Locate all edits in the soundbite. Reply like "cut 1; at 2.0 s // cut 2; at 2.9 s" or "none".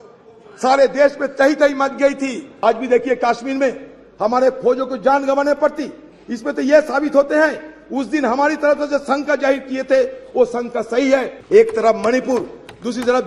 cut 1; at 2.6 s // cut 2; at 11.4 s